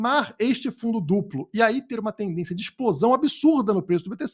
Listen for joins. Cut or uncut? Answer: uncut